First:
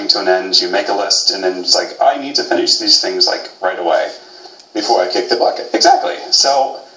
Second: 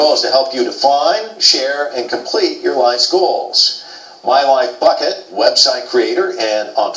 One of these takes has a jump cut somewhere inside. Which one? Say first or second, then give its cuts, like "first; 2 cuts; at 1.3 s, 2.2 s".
second; 1 cut; at 1.2 s